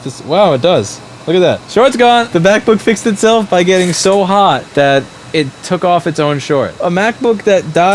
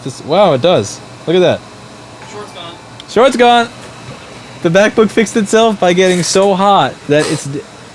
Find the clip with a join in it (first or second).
first